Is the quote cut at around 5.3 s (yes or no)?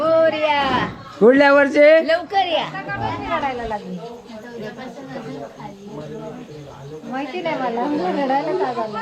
no